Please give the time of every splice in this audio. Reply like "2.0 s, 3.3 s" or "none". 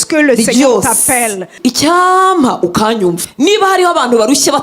1.5 s, 3.3 s